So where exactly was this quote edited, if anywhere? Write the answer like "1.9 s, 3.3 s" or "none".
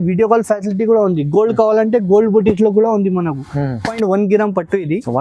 3.9 s